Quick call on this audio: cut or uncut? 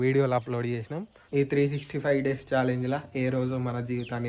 cut